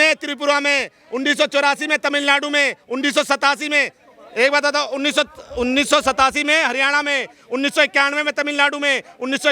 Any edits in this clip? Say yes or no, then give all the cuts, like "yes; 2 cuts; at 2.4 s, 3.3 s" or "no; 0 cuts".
no; 0 cuts